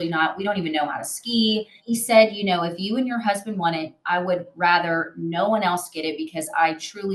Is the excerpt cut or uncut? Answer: cut